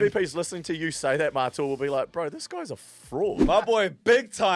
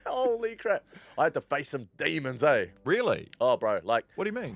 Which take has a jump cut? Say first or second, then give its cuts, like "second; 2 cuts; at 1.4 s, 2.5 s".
first; 1 cut; at 3.4 s